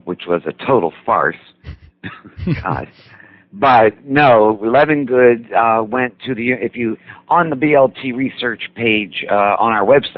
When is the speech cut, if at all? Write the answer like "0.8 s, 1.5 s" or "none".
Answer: 1.9 s